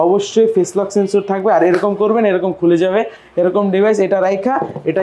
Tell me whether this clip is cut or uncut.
uncut